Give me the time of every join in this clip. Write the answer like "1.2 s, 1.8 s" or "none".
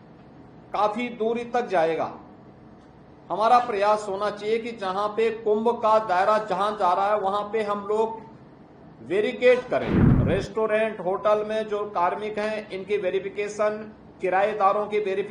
10.2 s